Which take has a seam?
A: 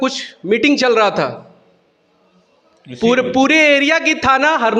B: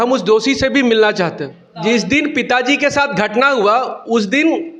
B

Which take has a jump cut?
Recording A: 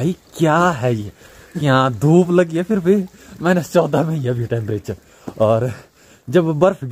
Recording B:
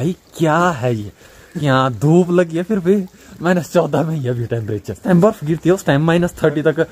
B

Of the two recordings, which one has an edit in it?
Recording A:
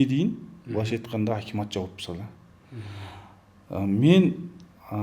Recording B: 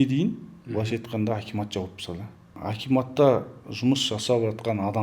B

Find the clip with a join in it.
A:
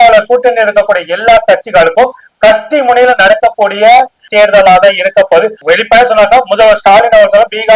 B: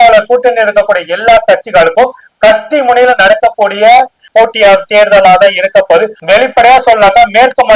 A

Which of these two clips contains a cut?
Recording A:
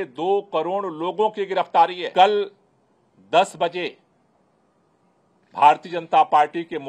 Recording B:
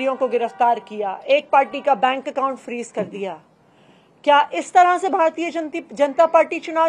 A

